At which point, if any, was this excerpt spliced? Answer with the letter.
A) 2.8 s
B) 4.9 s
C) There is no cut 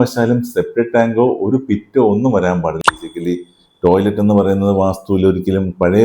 A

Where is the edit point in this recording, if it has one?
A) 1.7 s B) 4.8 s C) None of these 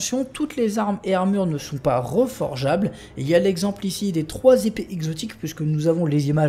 C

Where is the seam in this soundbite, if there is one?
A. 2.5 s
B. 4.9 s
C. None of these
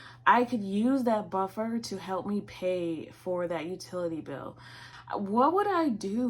B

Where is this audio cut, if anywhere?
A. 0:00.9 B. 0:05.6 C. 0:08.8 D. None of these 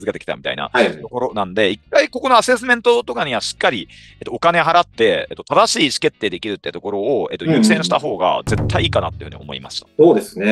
D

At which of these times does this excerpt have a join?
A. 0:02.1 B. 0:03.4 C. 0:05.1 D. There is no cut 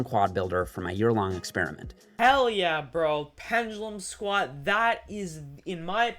A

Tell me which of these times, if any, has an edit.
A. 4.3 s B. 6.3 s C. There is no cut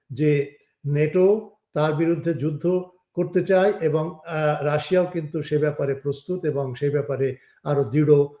C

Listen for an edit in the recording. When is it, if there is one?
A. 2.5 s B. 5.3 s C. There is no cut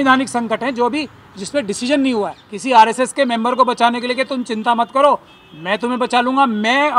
A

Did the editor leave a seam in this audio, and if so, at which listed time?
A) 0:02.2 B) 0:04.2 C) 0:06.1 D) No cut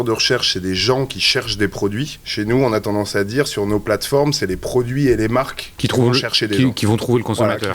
A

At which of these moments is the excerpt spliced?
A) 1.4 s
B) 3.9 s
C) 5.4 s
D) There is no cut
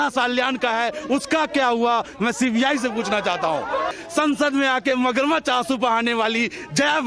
B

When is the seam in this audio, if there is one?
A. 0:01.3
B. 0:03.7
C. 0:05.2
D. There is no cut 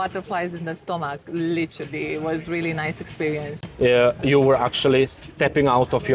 B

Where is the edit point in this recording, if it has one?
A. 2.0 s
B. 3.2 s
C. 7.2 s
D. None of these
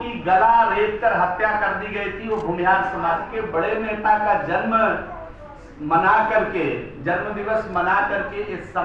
B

